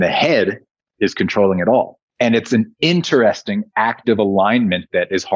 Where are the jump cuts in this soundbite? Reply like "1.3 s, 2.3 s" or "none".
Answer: 2.0 s